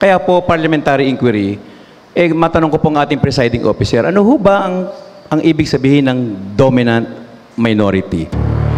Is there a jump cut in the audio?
no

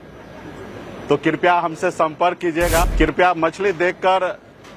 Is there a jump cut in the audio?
yes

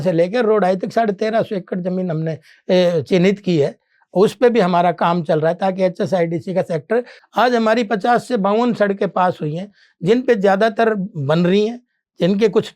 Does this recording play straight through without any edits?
no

